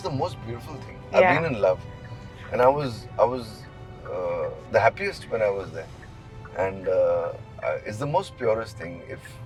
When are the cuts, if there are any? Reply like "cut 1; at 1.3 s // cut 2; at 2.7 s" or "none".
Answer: none